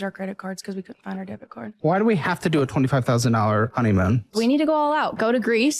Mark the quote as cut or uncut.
cut